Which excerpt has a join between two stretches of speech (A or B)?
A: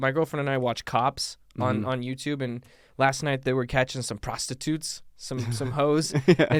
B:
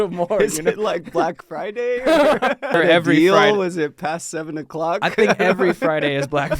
B